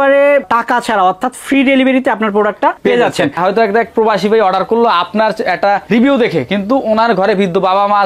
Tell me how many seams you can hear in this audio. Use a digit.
1